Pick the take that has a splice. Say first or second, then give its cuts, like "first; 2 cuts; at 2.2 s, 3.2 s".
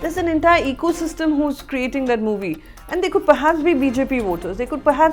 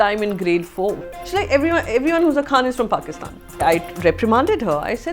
second; 2 cuts; at 1.1 s, 3.6 s